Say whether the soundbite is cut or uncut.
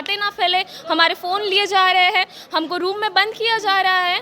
uncut